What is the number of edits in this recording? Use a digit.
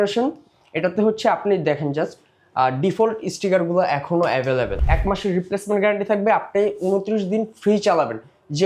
1